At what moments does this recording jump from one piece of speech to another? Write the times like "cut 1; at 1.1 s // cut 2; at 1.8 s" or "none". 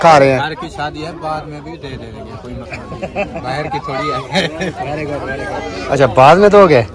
none